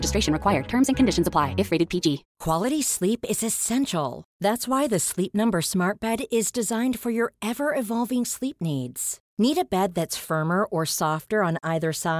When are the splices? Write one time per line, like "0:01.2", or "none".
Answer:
0:02.3